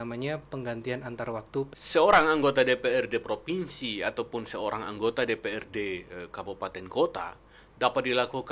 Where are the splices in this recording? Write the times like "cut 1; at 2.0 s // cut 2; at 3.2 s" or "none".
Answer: cut 1; at 1.8 s